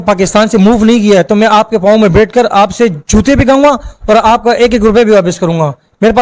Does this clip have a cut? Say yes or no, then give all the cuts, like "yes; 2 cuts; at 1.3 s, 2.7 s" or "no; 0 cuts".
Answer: no; 0 cuts